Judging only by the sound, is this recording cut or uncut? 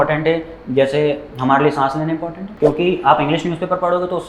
cut